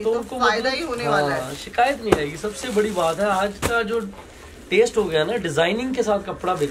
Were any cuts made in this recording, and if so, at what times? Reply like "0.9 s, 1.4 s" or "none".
none